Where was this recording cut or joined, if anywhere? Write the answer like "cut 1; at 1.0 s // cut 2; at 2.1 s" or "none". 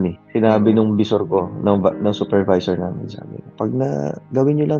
none